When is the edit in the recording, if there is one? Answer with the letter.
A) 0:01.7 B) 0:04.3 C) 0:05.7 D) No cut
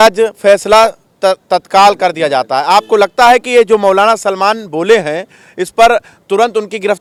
D